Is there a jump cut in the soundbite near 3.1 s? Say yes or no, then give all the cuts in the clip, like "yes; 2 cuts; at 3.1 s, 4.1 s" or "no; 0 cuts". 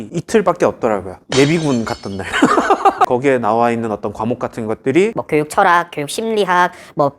yes; 1 cut; at 3.1 s